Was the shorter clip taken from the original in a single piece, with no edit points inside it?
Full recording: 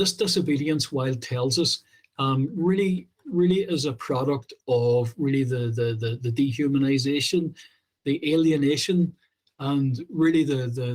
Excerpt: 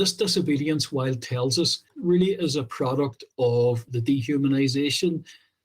no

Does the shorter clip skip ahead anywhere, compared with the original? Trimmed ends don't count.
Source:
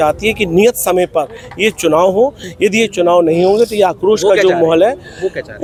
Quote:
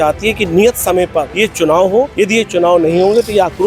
yes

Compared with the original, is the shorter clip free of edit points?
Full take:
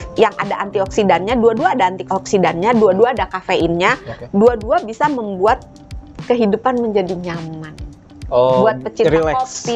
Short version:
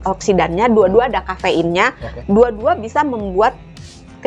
yes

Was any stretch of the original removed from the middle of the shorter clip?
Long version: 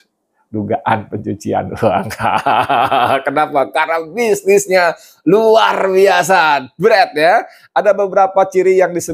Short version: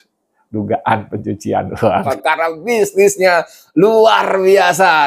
yes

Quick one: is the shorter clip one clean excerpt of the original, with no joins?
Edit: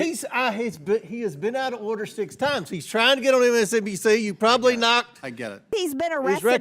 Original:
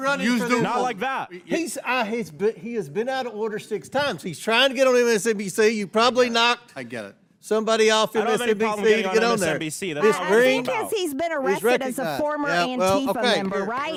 no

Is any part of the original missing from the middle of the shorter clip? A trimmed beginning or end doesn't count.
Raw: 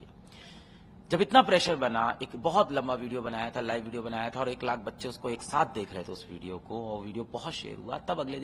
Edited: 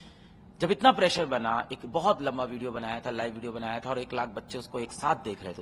no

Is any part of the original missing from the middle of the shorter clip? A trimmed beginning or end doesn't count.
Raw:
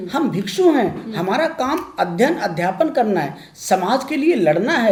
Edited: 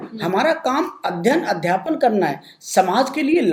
no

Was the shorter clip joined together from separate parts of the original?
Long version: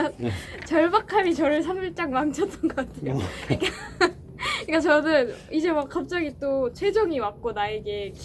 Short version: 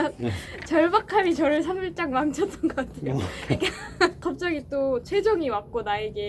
yes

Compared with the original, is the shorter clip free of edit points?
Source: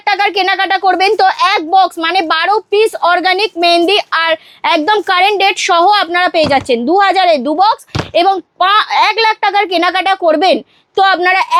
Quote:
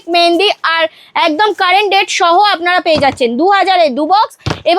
yes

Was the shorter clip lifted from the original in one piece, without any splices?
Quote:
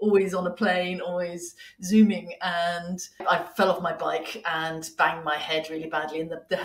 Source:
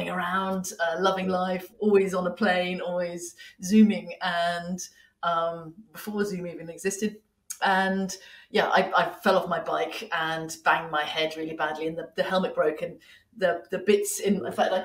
no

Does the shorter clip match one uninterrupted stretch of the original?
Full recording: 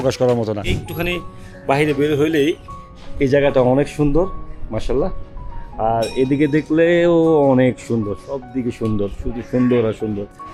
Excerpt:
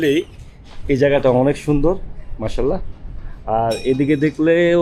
yes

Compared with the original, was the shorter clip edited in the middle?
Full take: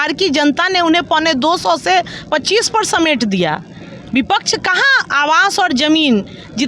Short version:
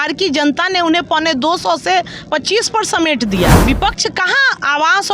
yes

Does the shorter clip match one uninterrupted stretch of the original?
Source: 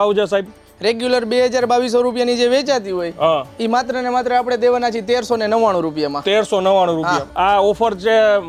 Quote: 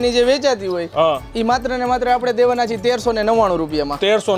yes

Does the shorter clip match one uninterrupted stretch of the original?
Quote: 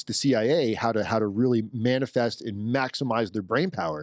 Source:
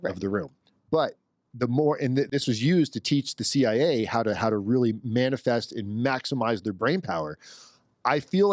yes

